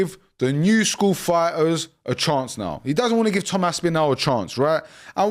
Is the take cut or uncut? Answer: uncut